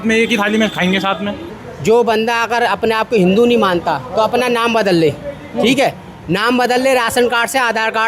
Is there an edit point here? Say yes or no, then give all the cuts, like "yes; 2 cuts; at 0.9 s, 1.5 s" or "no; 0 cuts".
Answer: yes; 1 cut; at 1.5 s